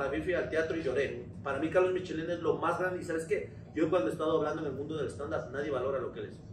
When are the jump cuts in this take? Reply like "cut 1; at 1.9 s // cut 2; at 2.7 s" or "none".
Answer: none